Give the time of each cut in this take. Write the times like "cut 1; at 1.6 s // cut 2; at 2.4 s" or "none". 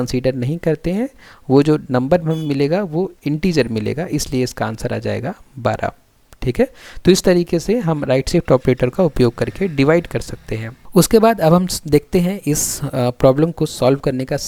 none